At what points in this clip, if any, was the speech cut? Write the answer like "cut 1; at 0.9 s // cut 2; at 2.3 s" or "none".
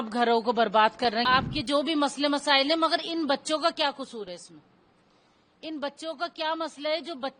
cut 1; at 1.2 s

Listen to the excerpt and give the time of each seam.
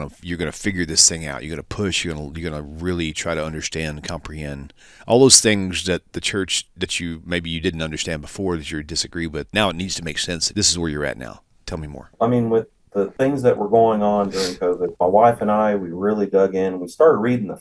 cut 1; at 9.5 s // cut 2; at 10.5 s // cut 3; at 12.1 s // cut 4; at 13.1 s // cut 5; at 14.9 s

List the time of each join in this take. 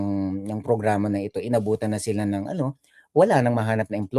none

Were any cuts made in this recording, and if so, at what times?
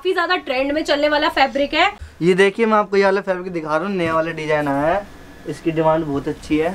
cut 1; at 2.0 s

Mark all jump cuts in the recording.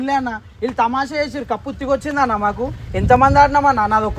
none

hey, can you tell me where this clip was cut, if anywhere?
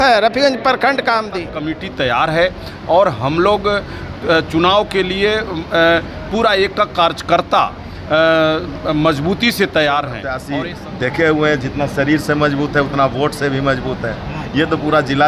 cut 1; at 1.4 s // cut 2; at 10.4 s

